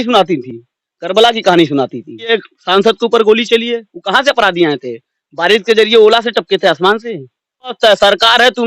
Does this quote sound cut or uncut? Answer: cut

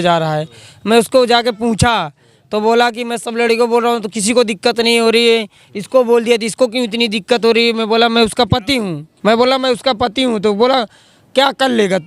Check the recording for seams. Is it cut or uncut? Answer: cut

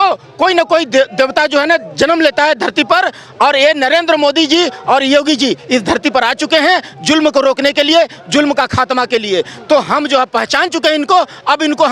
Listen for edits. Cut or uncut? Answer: uncut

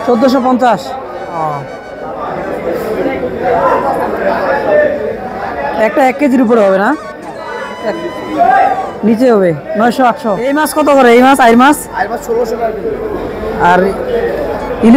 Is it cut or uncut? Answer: cut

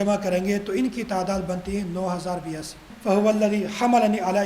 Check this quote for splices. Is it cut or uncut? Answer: cut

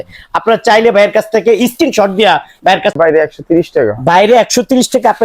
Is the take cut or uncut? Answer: cut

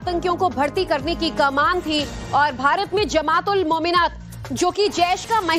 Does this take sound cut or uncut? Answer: uncut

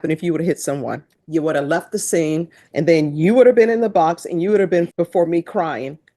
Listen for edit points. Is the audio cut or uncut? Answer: cut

